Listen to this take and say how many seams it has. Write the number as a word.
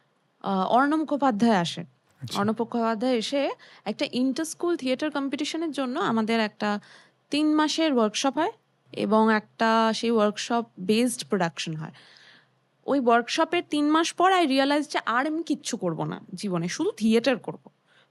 zero